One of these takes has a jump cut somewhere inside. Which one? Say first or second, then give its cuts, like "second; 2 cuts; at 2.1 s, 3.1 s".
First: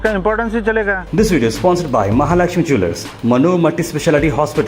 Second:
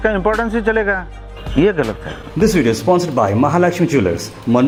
first; 1 cut; at 1.0 s